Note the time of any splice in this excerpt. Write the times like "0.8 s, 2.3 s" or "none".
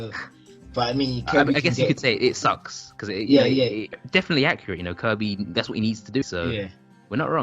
3.9 s, 6.2 s

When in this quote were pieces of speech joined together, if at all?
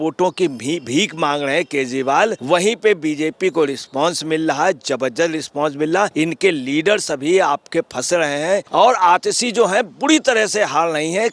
2.4 s, 6.1 s, 8.7 s

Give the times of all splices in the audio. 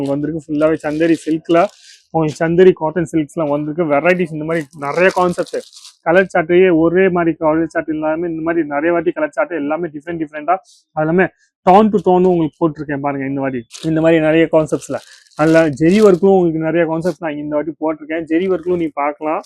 none

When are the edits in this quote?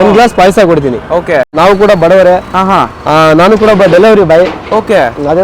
1.5 s

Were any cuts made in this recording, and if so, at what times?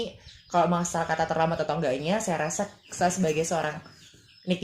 none

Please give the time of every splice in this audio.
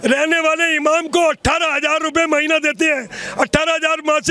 none

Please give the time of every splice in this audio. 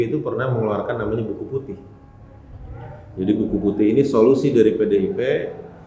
none

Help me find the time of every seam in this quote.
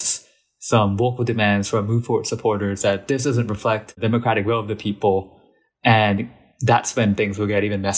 4.0 s

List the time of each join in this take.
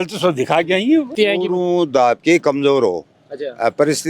1.1 s

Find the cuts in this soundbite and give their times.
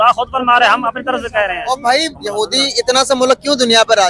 2.2 s

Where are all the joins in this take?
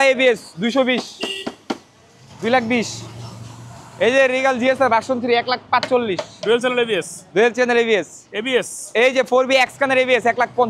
none

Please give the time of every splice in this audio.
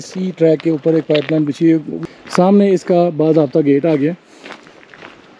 1.9 s

